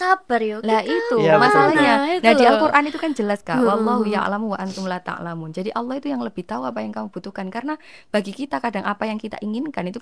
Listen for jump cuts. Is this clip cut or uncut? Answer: uncut